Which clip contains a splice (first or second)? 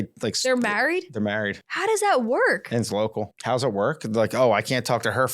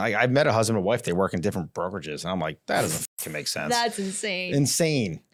first